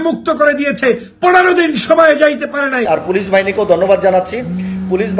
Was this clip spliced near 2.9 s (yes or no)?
yes